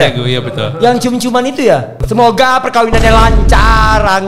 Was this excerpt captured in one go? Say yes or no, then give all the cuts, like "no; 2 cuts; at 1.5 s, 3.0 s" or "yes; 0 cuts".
no; 1 cut; at 2.0 s